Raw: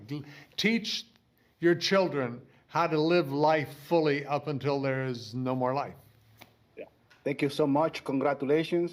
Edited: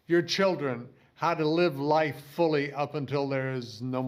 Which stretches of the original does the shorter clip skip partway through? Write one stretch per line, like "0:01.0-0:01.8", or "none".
none